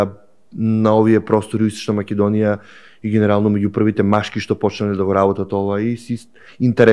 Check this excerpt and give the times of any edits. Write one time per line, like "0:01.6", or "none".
none